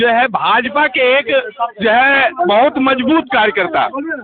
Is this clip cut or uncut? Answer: uncut